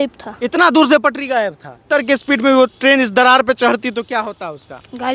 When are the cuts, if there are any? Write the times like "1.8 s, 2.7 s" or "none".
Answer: 1.9 s